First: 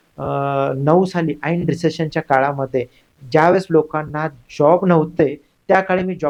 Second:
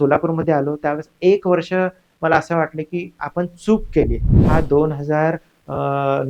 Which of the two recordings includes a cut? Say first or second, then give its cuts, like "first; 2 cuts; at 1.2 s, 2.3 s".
second; 1 cut; at 4.3 s